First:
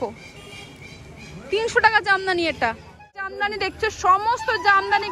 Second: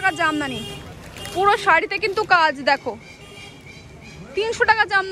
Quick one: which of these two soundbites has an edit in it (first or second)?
first